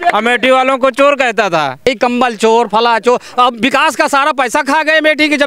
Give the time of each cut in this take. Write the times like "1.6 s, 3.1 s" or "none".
1.9 s